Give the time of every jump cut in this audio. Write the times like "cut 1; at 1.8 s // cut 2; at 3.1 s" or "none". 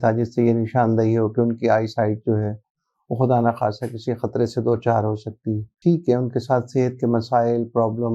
cut 1; at 5.7 s